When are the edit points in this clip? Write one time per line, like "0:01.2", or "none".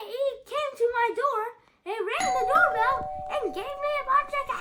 none